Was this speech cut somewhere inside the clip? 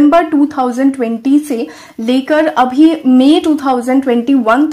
no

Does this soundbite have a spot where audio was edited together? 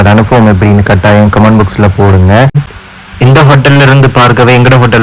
yes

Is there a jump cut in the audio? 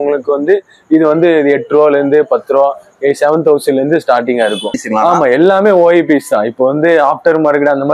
yes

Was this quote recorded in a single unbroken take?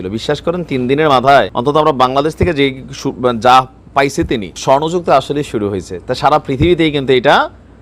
no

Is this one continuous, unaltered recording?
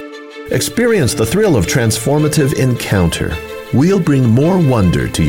yes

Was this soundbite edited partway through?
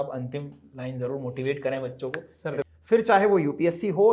yes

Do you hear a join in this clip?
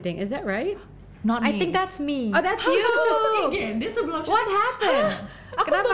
no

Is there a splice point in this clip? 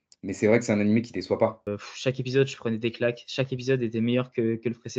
yes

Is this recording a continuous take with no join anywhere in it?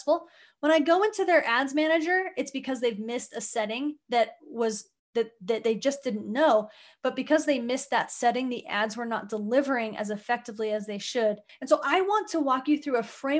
no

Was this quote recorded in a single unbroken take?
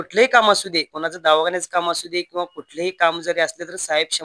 yes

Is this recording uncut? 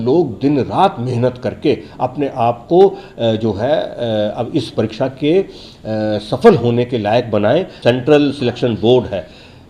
no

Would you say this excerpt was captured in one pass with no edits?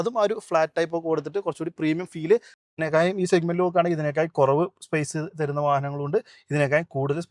no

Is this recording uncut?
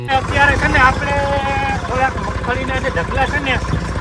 yes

